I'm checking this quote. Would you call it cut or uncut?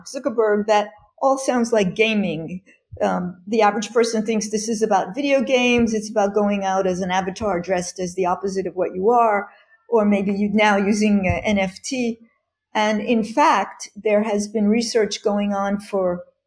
uncut